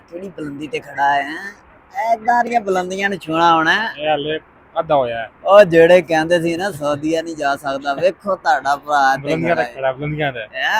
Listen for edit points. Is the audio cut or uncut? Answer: uncut